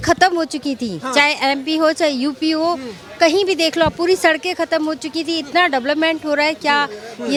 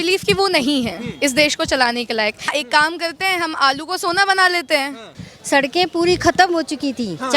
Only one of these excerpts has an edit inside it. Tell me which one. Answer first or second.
second